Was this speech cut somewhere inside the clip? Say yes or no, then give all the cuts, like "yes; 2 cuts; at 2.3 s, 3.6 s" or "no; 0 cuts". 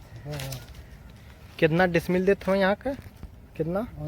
no; 0 cuts